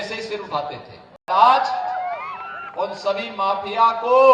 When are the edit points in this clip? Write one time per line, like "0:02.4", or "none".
0:01.3